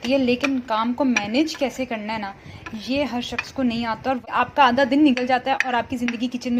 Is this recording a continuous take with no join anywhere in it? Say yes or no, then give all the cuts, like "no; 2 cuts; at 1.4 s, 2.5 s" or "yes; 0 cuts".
no; 1 cut; at 4.3 s